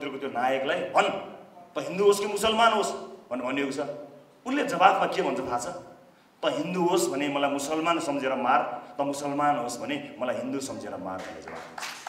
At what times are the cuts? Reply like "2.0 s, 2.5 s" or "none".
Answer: none